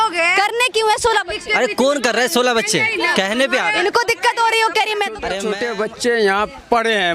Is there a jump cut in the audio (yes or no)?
yes